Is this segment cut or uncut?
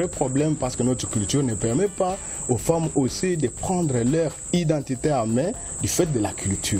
uncut